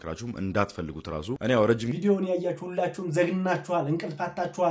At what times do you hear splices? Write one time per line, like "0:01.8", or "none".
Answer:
0:01.9